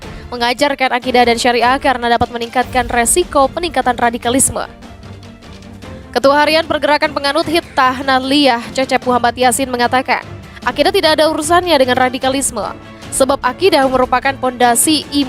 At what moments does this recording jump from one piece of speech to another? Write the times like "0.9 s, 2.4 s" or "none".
4.7 s, 6.1 s